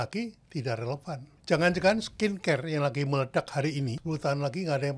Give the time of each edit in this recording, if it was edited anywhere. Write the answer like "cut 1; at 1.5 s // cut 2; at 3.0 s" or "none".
cut 1; at 1.3 s // cut 2; at 4.0 s